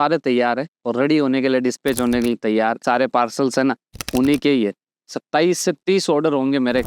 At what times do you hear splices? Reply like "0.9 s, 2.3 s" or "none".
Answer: none